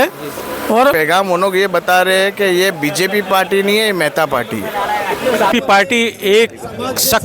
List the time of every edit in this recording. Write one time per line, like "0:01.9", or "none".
0:00.9
0:05.5

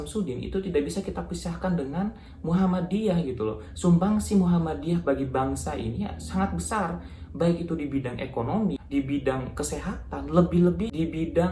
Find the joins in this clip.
none

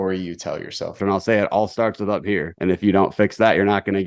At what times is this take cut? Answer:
0:01.0
0:02.5

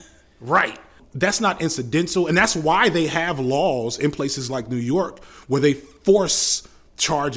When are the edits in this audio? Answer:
0:01.0

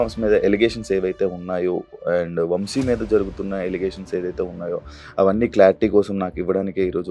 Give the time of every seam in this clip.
none

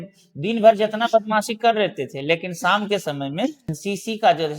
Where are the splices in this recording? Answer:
0:03.7

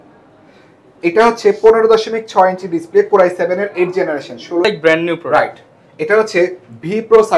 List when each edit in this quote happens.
0:04.7

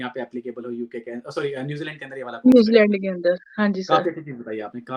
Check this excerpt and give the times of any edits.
none

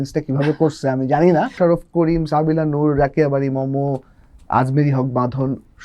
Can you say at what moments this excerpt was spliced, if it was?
0:01.5

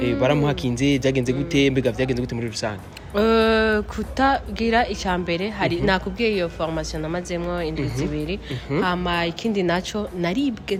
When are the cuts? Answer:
none

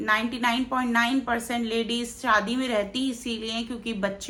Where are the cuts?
none

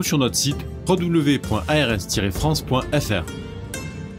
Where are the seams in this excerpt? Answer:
0:03.2

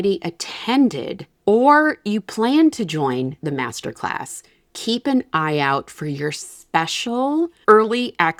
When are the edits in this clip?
none

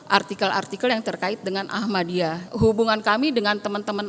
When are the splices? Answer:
0:02.4

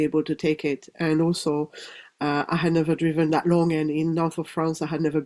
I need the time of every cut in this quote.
none

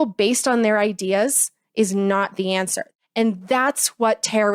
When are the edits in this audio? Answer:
0:02.8

